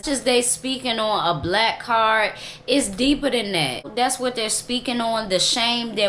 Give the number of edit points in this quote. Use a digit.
1